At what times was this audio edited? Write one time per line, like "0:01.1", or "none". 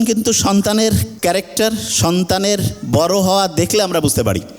0:01.1